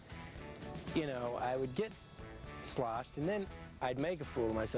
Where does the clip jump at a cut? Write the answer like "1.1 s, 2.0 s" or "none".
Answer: none